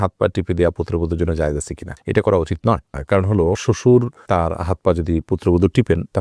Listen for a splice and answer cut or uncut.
uncut